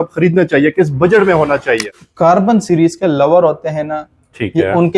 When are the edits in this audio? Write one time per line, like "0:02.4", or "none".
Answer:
0:02.0